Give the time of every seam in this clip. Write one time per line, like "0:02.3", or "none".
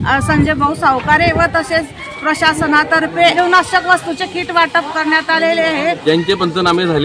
0:03.3
0:06.0